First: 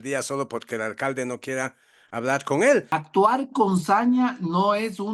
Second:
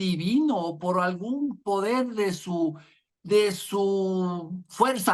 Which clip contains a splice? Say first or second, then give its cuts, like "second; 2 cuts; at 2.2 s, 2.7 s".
first; 1 cut; at 2.9 s